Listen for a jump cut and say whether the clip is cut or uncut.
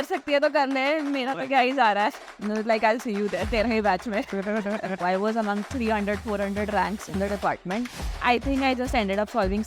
cut